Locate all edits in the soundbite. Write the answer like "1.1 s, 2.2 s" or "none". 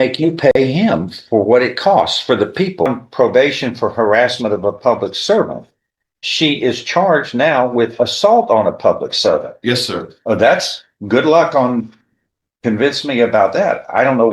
2.9 s